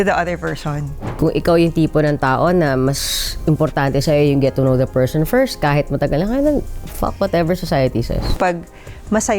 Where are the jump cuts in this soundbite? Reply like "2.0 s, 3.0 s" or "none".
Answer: 1.0 s, 8.3 s